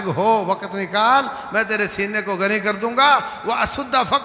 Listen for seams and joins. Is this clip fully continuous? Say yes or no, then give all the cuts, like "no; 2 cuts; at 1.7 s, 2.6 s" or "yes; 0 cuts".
yes; 0 cuts